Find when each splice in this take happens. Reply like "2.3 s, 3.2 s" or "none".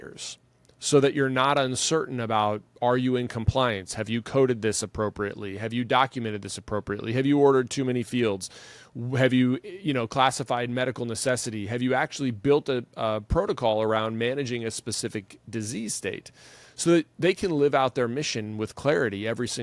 none

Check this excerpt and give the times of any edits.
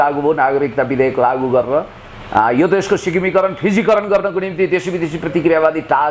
none

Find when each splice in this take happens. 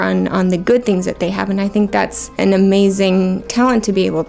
2.2 s, 3.5 s

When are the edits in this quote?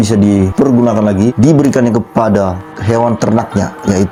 none

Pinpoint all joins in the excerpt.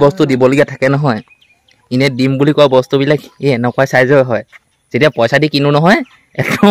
none

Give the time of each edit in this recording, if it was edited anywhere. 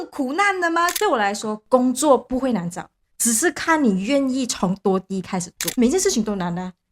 0.9 s, 5.6 s

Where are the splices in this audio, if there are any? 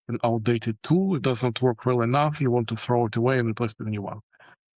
none

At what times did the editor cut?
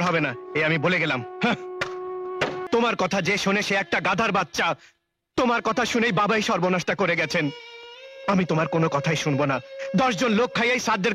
2.6 s

